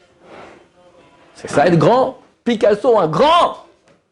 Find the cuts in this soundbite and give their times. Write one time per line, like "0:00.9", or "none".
0:02.3